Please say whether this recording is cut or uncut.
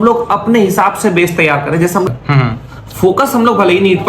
cut